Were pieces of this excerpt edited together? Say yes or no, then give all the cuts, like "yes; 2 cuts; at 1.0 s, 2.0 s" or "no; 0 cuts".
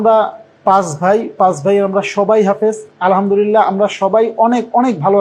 no; 0 cuts